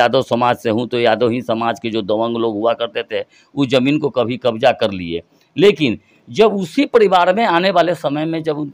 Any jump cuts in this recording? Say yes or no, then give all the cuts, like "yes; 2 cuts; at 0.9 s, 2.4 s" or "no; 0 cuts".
no; 0 cuts